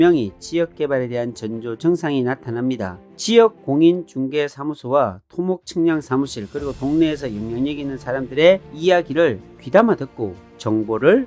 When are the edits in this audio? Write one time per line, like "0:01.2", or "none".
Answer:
0:03.0